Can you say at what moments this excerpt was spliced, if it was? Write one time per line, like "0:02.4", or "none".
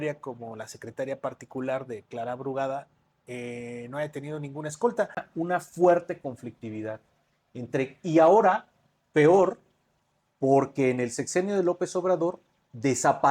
0:05.2

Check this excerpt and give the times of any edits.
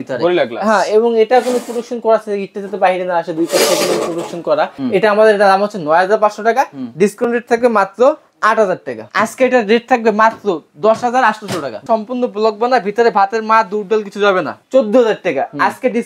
0:04.8
0:09.0
0:11.8
0:14.6

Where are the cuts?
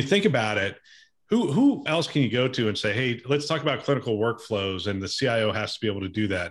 none

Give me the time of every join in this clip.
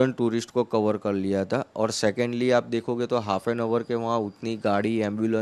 none

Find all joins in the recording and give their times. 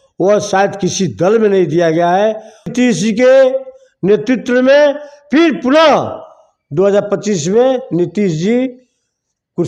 0:02.7

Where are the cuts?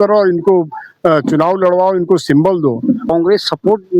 0:03.0

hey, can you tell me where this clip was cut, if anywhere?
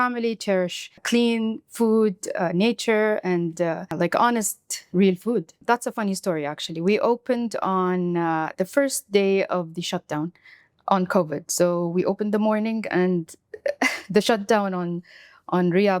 0:01.0
0:03.9
0:05.6

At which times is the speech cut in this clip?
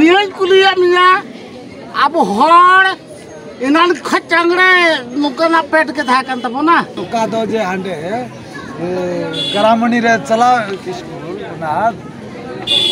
0:07.0

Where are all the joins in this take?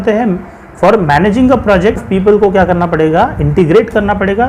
0:02.0

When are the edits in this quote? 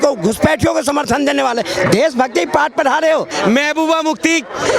0:03.3

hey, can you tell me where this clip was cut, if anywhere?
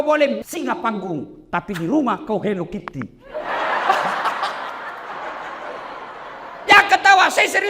0:05.1

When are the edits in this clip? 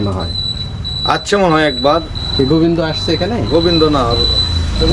none

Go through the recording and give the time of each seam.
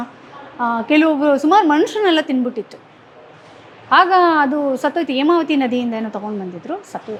none

